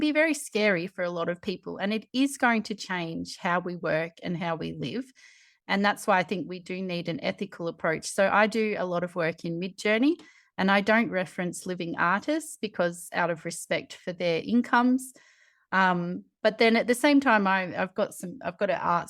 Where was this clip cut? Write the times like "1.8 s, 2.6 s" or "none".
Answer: none